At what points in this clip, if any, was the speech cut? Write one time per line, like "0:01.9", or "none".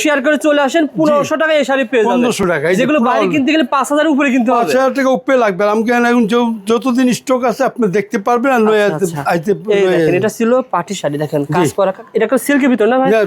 none